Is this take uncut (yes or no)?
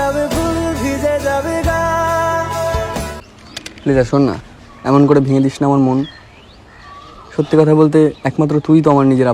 no